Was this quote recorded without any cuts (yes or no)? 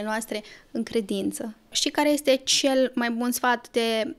no